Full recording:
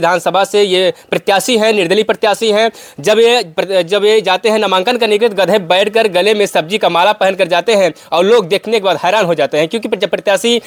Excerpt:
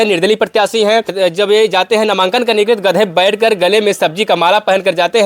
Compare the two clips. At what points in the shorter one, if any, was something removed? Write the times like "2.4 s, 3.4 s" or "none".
1.1 s